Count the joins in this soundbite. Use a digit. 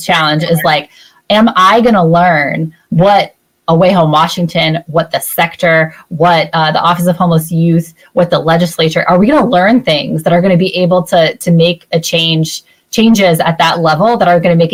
0